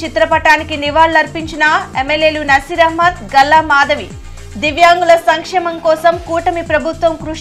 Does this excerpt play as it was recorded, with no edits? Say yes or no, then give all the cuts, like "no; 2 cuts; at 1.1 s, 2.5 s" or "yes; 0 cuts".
yes; 0 cuts